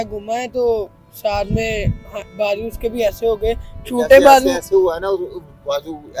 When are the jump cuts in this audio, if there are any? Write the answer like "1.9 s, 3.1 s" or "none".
none